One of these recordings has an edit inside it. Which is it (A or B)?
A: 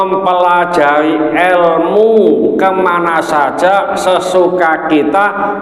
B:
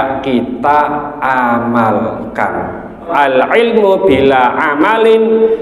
B